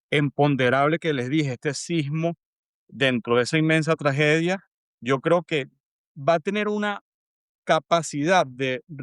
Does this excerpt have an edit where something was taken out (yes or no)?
no